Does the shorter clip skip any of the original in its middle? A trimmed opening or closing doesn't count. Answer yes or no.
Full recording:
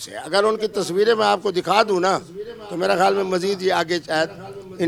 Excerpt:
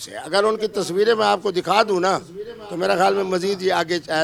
no